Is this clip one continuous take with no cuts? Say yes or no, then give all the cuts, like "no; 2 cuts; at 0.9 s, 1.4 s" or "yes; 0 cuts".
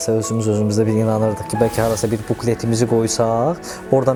yes; 0 cuts